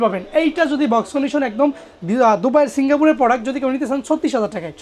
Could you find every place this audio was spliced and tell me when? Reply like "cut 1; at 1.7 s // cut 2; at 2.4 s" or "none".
none